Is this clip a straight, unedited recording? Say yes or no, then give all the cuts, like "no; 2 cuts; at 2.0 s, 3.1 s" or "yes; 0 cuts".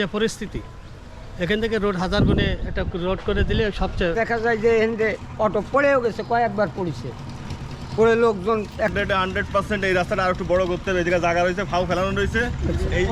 no; 2 cuts; at 4.1 s, 8.9 s